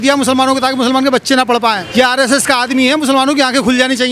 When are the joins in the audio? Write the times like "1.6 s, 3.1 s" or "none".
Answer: 1.8 s

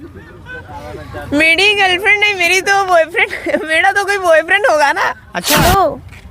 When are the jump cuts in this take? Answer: 5.3 s

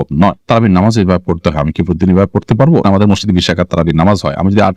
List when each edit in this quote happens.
2.8 s

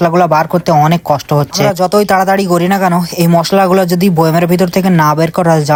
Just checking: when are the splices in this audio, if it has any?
none

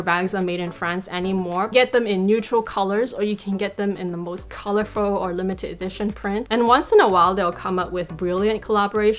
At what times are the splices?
1.7 s, 6.5 s

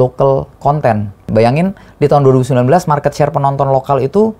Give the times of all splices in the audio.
1.3 s

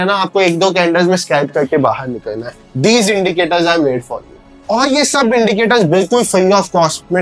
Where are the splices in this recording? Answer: none

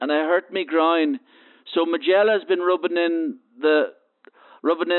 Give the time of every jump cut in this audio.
none

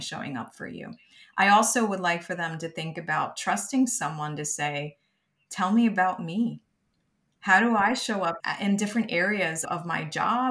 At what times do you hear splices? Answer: 8.4 s, 9.6 s

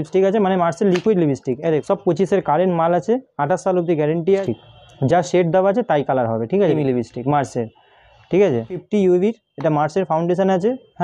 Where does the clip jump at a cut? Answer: 1.8 s, 4.4 s, 6.8 s, 8.8 s

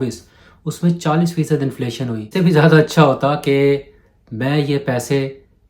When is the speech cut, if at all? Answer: 2.3 s

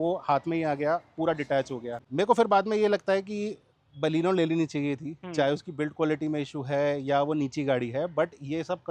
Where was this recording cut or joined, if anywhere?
2.0 s

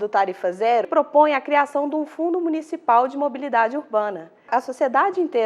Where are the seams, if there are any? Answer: 0.9 s, 4.5 s

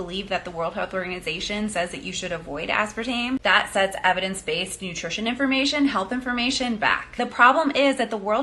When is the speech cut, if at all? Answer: 7.1 s

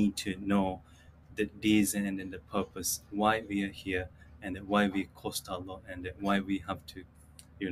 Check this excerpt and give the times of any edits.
none

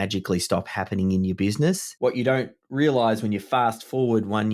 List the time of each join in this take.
1.9 s

